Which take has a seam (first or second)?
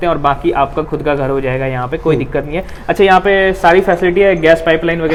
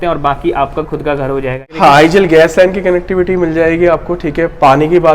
second